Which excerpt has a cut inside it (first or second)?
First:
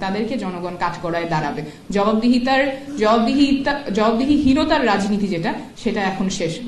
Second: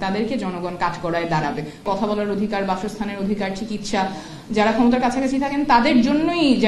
second